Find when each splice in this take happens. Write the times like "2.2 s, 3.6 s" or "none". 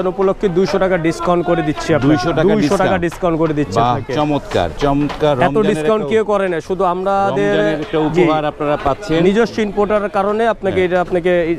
none